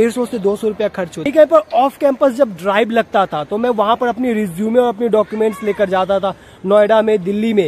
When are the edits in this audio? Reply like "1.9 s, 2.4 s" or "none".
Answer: 1.2 s

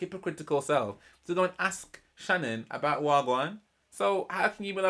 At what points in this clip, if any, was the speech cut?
none

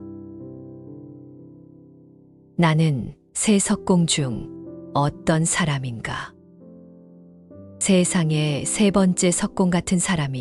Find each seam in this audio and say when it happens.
none

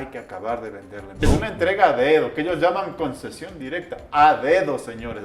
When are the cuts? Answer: 1.2 s

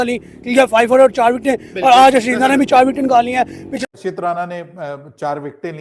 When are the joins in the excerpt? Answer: 3.9 s

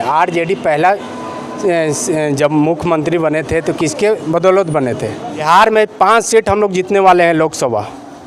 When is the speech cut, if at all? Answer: 5.4 s

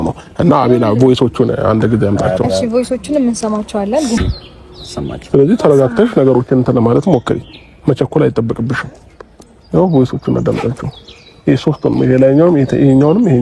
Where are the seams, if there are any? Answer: 4.2 s

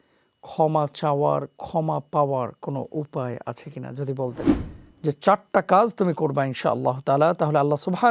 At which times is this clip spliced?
4.5 s

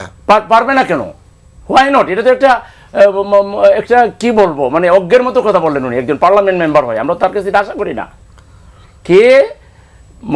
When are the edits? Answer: none

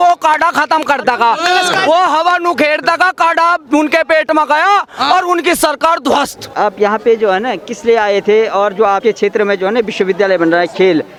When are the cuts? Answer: none

